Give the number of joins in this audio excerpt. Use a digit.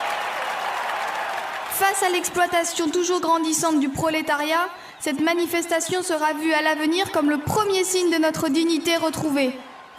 1